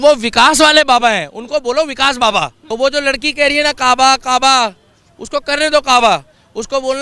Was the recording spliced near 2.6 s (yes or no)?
yes